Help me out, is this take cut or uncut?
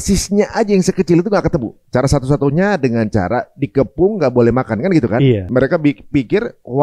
cut